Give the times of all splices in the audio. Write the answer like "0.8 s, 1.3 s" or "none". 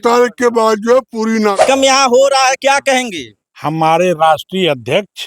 1.6 s